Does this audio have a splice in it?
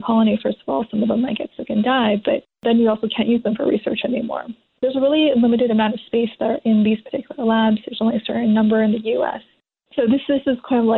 yes; 1 cut; at 4.8 s

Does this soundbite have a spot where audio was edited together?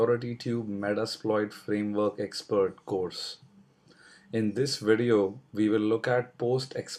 no; 0 cuts

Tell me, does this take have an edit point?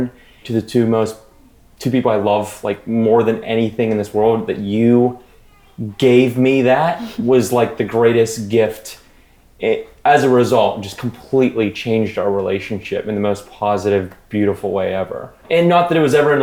no; 0 cuts

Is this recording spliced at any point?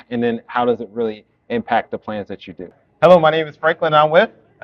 yes; 1 cut; at 2.8 s

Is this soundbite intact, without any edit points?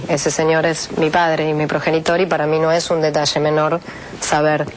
yes; 0 cuts

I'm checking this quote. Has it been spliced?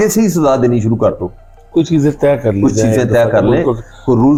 no; 0 cuts

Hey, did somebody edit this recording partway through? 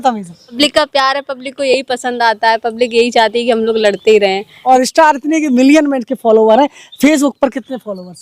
yes; 1 cut; at 4.5 s

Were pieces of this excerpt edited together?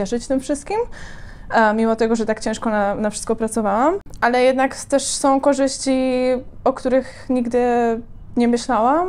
no; 0 cuts

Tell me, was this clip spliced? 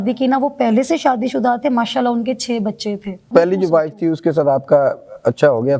yes; 1 cut; at 3.3 s

